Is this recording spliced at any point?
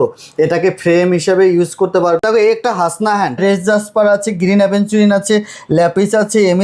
yes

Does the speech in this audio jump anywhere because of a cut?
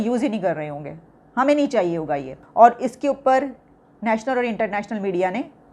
yes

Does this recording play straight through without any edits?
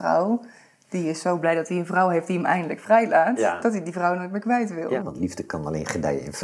no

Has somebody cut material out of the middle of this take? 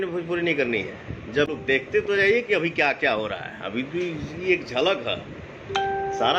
yes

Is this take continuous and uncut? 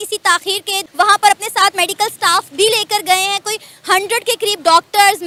yes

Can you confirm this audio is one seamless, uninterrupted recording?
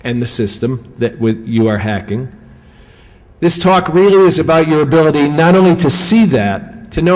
no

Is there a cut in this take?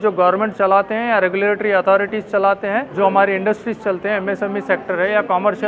yes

